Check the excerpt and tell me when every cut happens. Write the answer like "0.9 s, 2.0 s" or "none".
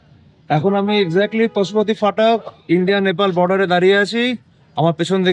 none

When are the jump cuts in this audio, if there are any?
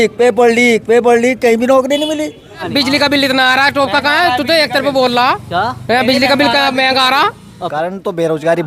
2.6 s, 7.6 s

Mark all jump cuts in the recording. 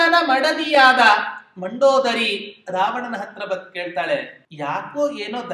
4.4 s

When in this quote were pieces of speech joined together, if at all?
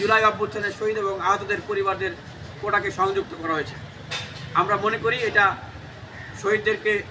none

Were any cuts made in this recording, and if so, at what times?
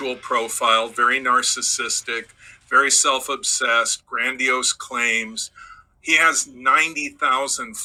none

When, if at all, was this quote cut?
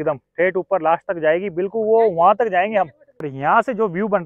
3.3 s

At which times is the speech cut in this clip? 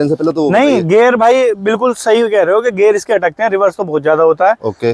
none

